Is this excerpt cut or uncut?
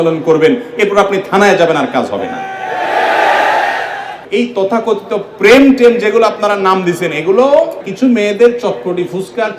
cut